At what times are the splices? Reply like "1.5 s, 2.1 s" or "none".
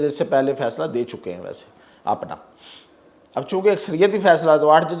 none